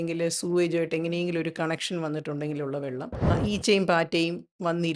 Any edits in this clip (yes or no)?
yes